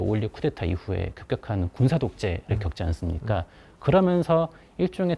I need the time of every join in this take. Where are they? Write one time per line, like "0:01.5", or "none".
none